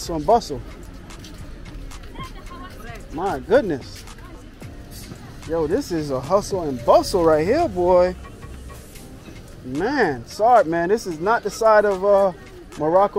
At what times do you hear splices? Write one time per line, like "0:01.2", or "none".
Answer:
none